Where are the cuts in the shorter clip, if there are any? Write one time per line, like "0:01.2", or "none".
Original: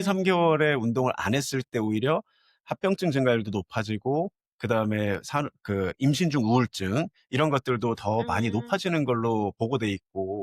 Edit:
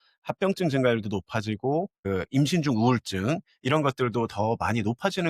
0:02.0